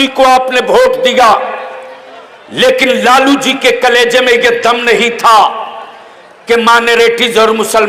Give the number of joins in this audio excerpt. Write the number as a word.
zero